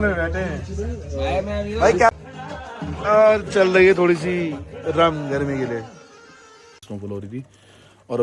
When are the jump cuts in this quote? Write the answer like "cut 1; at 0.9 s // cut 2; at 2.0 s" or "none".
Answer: cut 1; at 2.1 s // cut 2; at 6.8 s